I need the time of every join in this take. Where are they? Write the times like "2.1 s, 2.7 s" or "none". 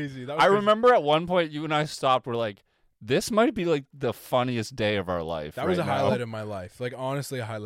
none